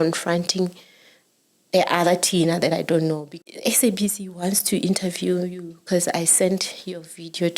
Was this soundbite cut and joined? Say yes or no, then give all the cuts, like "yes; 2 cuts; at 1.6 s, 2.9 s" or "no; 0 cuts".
yes; 1 cut; at 3.3 s